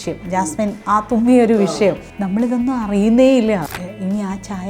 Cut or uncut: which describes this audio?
cut